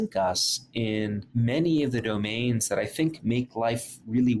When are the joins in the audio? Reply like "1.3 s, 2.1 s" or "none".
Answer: 1.2 s